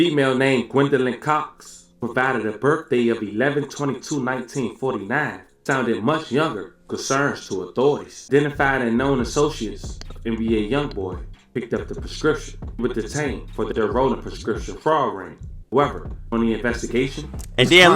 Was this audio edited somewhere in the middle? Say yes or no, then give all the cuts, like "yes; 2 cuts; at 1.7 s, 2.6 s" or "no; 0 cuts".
yes; 1 cut; at 8.1 s